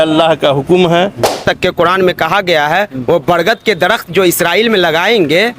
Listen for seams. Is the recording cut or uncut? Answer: cut